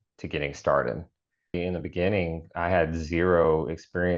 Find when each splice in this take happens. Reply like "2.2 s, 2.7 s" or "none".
1.5 s

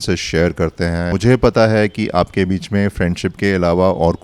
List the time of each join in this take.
1.1 s

